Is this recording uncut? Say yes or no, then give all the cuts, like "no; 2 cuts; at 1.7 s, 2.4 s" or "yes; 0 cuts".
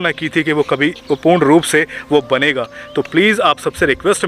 no; 1 cut; at 1.0 s